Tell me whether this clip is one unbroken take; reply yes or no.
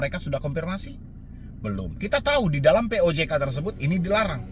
yes